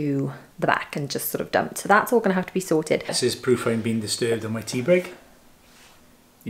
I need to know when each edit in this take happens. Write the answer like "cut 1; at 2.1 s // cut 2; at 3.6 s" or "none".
cut 1; at 3.2 s